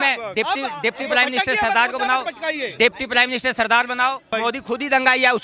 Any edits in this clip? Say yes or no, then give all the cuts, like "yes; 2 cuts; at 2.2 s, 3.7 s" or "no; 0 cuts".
yes; 1 cut; at 4.3 s